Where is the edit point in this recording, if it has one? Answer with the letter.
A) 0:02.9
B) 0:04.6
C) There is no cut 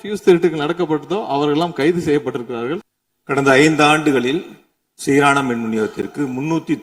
A